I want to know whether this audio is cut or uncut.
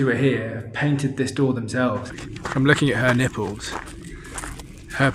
cut